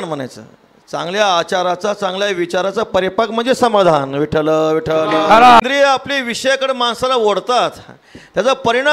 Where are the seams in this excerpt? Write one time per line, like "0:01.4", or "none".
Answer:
0:05.6